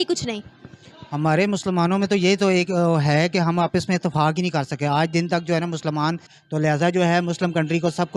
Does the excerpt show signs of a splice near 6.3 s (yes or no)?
yes